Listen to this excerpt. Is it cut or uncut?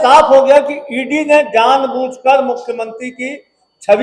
uncut